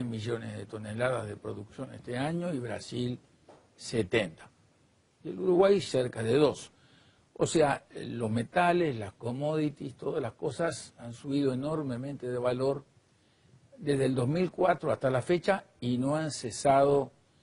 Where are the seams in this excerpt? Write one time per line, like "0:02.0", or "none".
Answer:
0:05.5